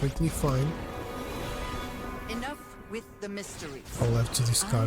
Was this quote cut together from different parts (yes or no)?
no